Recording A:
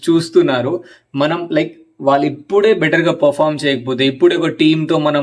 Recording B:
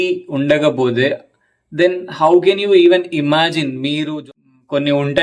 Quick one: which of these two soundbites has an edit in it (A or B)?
B